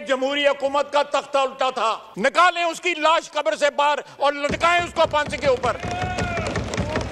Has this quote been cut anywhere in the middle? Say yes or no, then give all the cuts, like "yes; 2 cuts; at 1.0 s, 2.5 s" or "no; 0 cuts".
no; 0 cuts